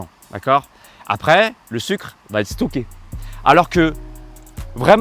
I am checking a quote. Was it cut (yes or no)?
yes